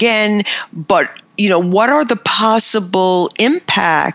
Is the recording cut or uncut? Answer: cut